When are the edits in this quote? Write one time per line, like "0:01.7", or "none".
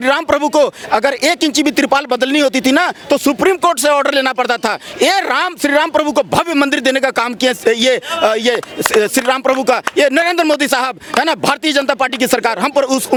none